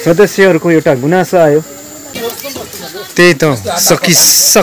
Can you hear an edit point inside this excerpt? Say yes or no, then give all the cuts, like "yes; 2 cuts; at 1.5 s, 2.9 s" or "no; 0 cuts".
yes; 1 cut; at 2.1 s